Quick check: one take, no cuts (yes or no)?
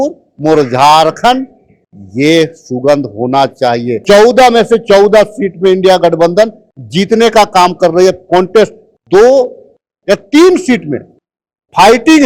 no